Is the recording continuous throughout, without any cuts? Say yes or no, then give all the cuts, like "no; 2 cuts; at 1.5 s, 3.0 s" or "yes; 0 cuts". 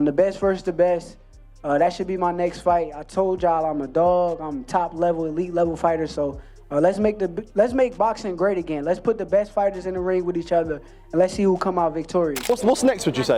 yes; 0 cuts